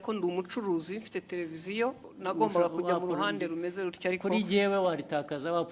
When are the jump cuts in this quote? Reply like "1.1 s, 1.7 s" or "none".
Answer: 2.0 s